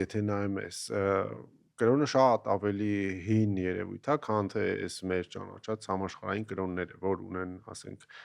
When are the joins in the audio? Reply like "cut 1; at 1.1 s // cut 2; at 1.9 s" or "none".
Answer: none